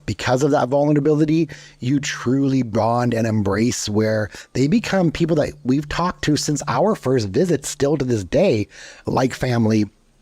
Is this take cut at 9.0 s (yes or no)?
yes